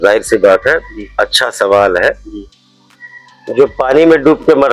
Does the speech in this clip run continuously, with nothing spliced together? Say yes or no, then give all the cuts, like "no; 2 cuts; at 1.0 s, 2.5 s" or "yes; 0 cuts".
yes; 0 cuts